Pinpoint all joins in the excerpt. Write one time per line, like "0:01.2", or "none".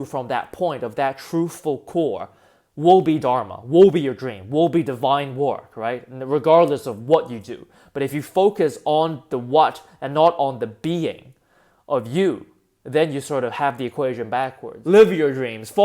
0:14.7